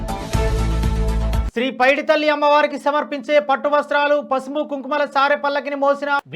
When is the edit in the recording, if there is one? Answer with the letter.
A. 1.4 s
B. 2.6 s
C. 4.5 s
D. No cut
A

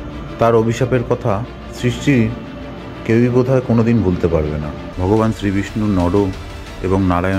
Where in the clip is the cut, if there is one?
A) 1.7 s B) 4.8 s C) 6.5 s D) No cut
B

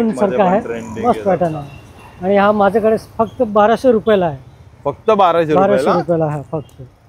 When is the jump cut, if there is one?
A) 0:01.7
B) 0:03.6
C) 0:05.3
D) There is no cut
D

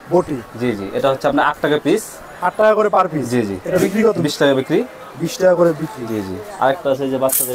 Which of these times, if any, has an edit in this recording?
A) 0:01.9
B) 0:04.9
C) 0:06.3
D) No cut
D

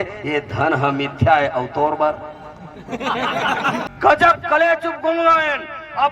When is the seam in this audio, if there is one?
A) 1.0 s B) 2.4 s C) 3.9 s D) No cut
C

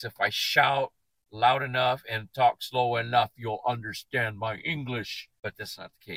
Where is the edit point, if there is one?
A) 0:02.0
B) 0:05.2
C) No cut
B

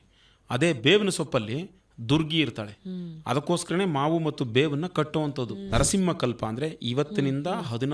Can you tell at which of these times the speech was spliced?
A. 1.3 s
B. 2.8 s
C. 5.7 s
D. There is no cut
C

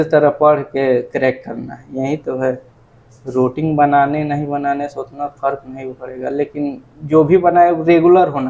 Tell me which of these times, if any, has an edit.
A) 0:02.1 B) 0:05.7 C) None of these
C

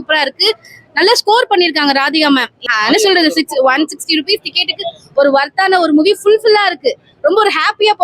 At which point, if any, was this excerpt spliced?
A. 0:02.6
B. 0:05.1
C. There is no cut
A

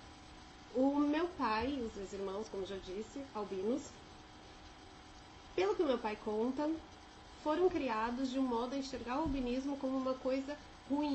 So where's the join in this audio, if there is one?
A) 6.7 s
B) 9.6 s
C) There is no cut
A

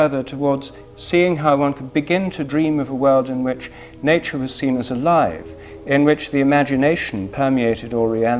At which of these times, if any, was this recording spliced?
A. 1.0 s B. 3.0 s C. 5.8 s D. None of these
D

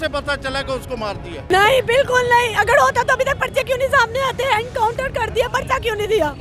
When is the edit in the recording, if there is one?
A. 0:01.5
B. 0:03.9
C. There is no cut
A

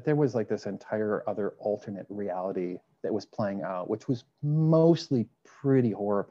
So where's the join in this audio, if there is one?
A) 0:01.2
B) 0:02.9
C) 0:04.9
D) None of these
B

